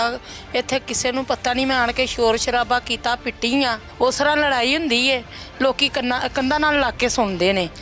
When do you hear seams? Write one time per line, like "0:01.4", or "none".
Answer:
0:03.8